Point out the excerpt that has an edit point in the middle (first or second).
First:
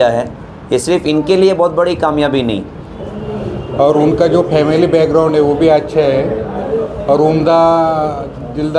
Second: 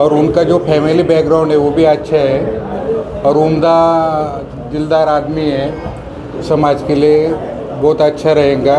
first